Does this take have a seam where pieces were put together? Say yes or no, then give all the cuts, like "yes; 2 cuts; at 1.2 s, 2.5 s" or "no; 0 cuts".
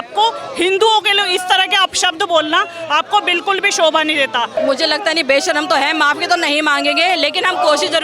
yes; 1 cut; at 4.6 s